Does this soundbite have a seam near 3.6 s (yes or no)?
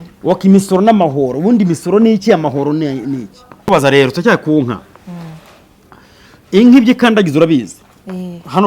yes